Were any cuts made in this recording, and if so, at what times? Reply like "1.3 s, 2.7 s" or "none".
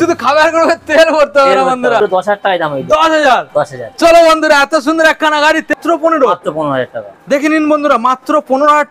2.0 s, 5.8 s